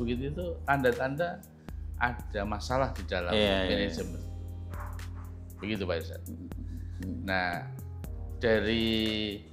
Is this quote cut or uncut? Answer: uncut